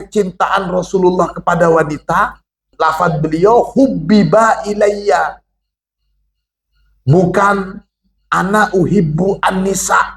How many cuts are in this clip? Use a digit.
1